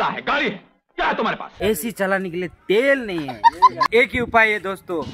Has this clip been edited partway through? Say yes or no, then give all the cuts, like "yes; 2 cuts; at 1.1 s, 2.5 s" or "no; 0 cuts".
yes; 2 cuts; at 1.5 s, 3.9 s